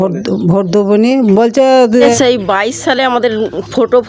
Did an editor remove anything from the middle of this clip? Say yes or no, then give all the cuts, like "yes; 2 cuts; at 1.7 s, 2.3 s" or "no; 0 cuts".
yes; 1 cut; at 2.0 s